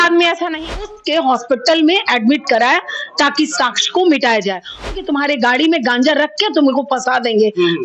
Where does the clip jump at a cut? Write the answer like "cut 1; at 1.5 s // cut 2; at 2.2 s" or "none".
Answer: cut 1; at 0.9 s // cut 2; at 4.9 s